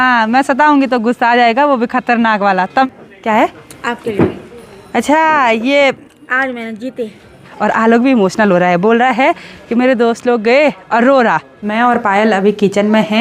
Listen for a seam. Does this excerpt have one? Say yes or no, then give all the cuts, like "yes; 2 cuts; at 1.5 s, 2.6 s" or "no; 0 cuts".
yes; 3 cuts; at 2.8 s, 7.5 s, 11.6 s